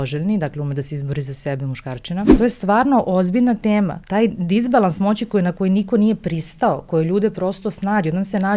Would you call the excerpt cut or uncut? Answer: cut